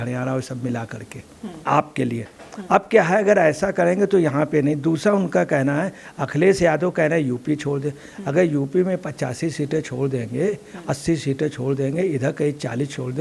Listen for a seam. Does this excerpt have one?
yes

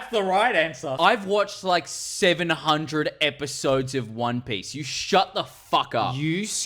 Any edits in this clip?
yes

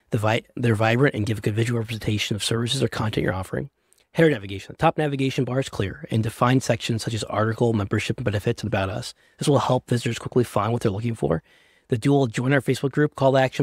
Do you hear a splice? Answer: no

